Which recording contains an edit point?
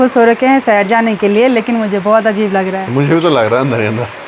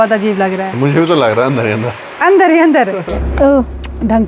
second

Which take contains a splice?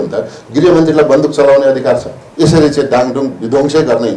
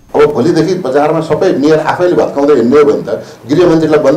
first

